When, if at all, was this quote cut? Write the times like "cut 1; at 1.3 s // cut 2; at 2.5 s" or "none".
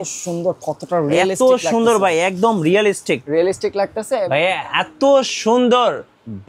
cut 1; at 4.2 s